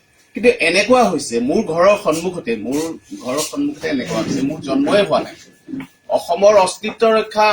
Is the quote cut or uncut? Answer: cut